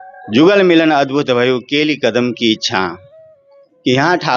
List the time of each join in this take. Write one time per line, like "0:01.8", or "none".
none